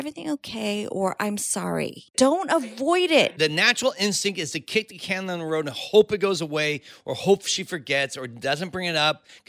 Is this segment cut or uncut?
cut